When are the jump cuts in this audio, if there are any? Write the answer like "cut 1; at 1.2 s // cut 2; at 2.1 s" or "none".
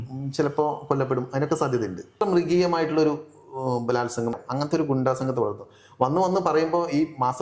cut 1; at 2.2 s // cut 2; at 4.3 s